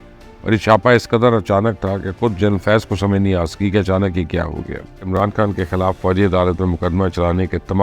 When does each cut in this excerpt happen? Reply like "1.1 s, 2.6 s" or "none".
5.1 s